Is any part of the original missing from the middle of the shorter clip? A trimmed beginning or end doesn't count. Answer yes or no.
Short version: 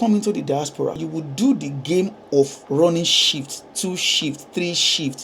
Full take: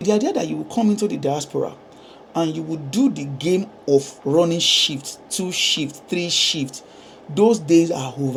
yes